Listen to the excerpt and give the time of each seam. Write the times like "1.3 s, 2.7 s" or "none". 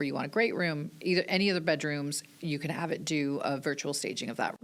none